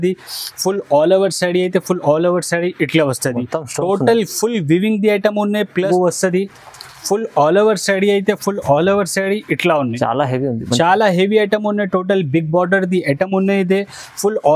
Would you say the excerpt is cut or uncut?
cut